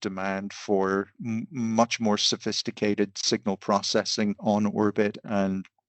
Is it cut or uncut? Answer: cut